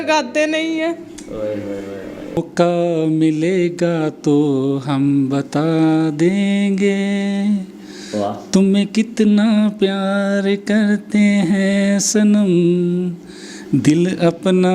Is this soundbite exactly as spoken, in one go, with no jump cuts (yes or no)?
no